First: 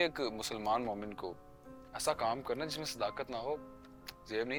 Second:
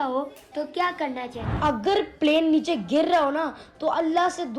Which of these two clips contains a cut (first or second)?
second